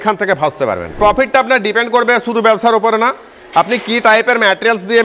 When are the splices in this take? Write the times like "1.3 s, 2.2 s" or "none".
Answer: 1.0 s